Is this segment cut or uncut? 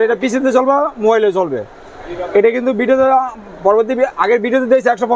uncut